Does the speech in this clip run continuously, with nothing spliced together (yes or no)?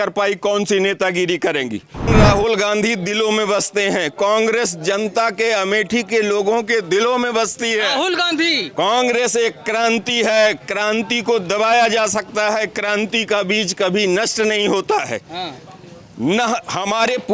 no